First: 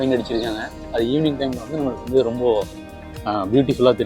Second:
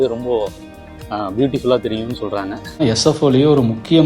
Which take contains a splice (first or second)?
second